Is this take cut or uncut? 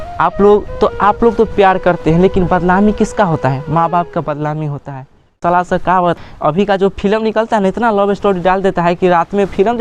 cut